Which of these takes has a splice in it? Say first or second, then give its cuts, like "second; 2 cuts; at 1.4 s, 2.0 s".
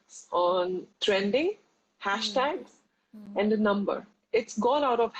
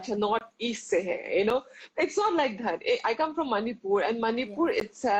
first; 2 cuts; at 0.8 s, 4.2 s